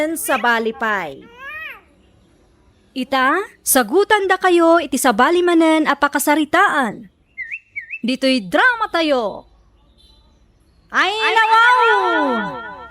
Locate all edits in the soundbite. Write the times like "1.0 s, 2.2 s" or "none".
1.1 s, 2.9 s